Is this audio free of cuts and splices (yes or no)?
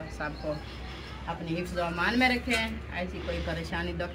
yes